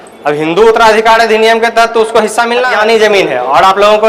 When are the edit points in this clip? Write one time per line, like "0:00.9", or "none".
0:02.7